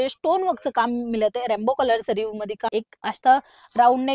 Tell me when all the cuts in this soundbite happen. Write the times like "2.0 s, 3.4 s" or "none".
2.7 s